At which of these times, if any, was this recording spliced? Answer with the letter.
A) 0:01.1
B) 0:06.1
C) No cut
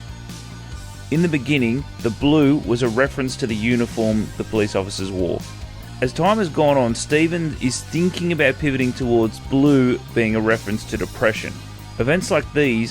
A